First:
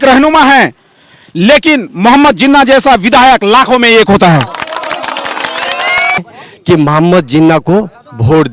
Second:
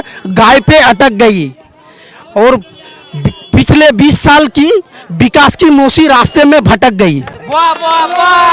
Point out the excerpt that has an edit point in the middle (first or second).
first